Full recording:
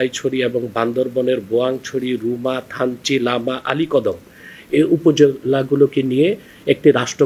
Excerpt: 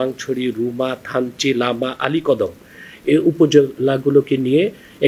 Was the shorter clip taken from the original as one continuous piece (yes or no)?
yes